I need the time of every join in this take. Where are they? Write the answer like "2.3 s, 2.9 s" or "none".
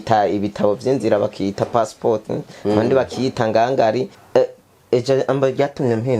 4.2 s